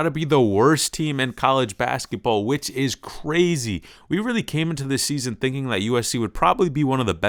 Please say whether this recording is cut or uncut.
uncut